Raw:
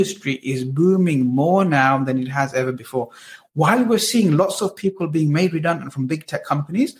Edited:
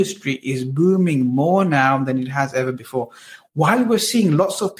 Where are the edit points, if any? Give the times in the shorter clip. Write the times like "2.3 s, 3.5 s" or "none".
none